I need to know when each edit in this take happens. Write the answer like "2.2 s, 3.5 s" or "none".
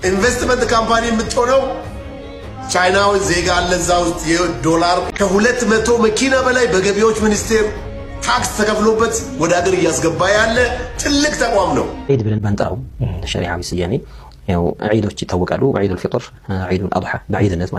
5.1 s, 12.1 s

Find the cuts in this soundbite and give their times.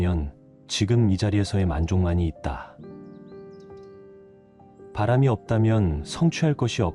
2.7 s, 4.9 s

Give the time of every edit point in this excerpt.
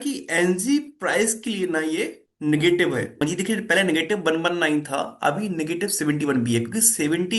3.2 s

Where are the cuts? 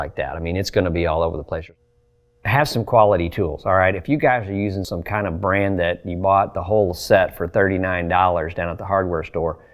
1.7 s, 4.9 s

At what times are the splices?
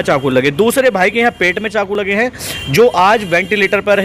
none

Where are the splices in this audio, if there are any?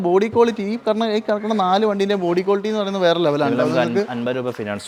none

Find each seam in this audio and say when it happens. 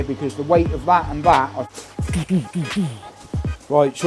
1.6 s

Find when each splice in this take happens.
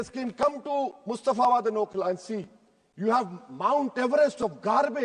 none

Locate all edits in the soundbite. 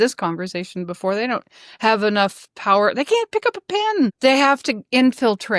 4.1 s

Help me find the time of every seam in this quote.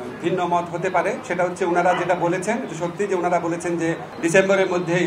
4.1 s

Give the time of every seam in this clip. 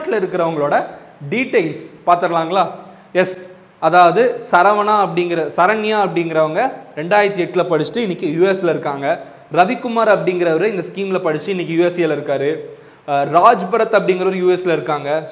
none

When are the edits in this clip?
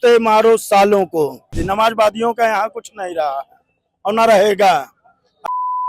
1.6 s

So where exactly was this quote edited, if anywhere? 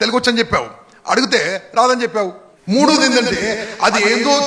2.5 s

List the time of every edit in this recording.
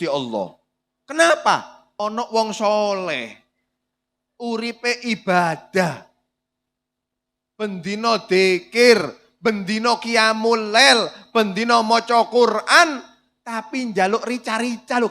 1.8 s

